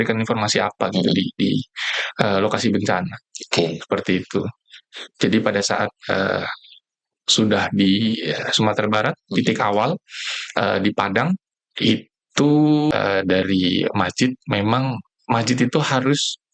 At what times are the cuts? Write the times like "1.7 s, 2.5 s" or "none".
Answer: 12.9 s